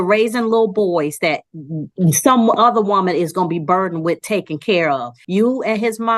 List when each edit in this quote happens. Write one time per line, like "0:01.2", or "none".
0:05.1